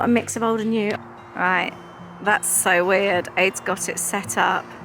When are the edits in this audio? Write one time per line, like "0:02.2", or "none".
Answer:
0:01.0